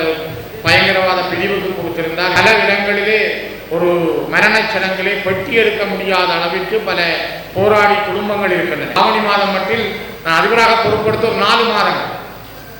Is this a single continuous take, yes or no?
no